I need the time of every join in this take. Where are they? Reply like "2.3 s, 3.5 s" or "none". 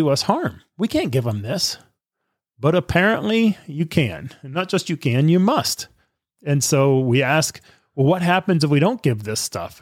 none